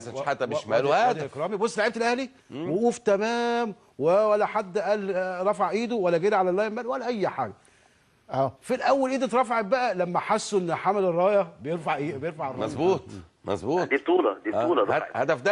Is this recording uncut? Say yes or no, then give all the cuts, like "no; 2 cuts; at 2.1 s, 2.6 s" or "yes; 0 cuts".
no; 1 cut; at 6.3 s